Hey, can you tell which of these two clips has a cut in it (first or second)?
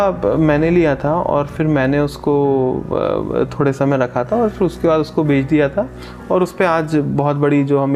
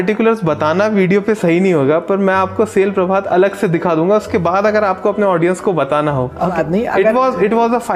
second